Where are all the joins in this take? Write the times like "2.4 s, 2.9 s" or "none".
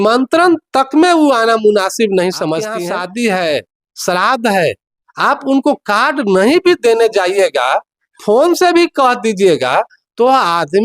2.8 s